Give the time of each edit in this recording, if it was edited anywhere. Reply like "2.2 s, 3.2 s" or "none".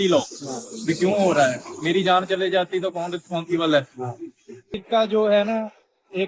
4.7 s